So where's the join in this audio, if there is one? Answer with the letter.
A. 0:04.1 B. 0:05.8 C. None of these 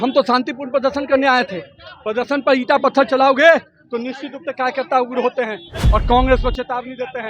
B